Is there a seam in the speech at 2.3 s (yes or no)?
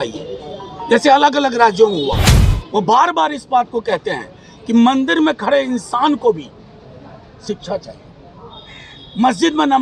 yes